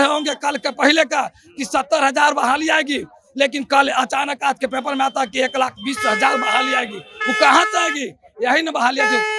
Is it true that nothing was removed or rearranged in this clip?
yes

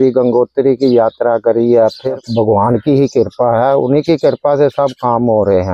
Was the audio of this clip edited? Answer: yes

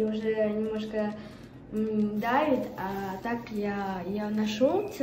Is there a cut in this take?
no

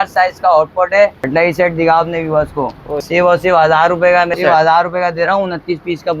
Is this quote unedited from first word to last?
no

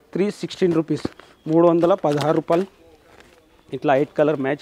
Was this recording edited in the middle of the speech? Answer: no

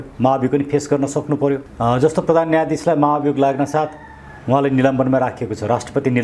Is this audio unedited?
no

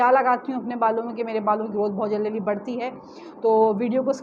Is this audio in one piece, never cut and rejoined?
yes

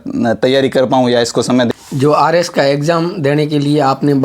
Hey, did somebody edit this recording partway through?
yes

